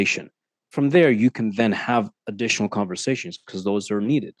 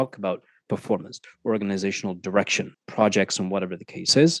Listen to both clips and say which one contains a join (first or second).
second